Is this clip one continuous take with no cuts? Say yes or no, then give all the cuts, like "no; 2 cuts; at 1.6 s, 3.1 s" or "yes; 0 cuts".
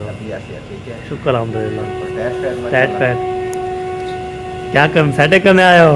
yes; 0 cuts